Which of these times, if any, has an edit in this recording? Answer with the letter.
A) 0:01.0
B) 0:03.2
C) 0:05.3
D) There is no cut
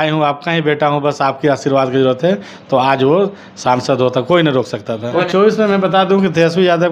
C